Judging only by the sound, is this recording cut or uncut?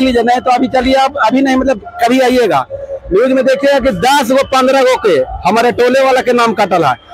uncut